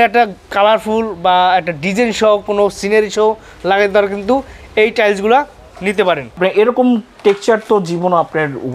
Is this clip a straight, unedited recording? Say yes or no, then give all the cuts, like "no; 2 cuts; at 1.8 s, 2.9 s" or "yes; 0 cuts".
no; 1 cut; at 6.4 s